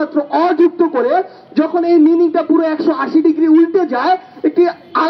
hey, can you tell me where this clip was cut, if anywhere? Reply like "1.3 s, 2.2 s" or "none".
none